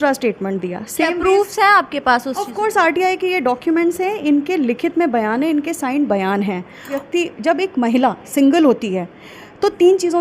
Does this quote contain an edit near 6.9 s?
yes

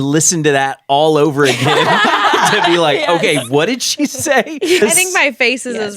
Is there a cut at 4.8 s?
yes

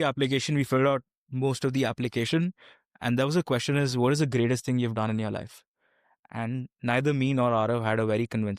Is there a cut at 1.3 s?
no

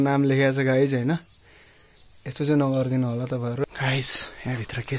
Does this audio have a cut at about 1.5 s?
no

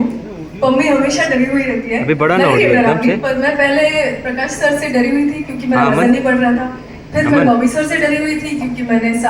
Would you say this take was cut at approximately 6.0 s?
no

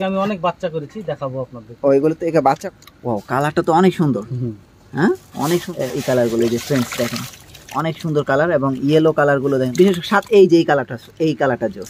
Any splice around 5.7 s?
yes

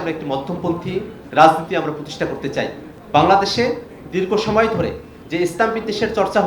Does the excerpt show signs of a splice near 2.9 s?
yes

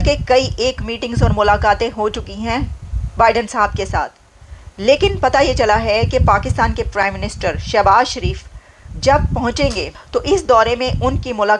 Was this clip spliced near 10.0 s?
yes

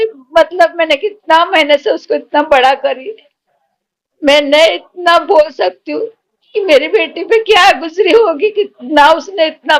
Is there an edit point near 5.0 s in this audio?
no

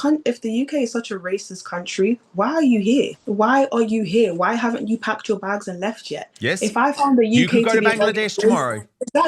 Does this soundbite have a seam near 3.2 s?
yes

